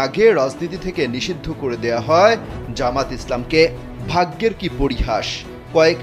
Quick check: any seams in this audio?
no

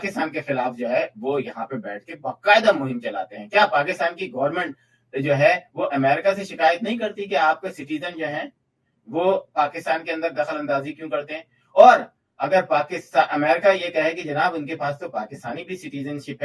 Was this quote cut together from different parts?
no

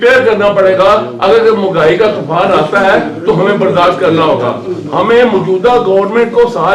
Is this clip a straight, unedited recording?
yes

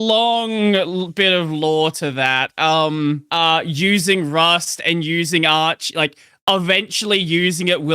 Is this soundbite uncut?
no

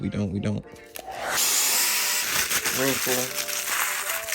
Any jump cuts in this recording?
yes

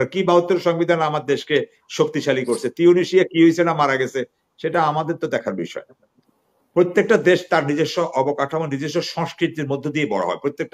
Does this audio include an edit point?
no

